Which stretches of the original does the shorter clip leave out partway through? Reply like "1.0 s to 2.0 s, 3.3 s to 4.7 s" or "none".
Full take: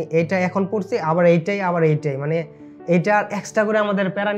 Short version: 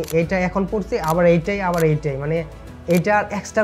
none